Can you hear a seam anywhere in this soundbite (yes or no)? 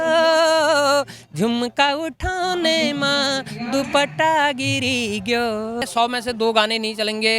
yes